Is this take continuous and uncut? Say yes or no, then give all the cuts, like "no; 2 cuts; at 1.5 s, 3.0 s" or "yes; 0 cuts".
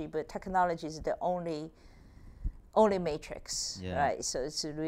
yes; 0 cuts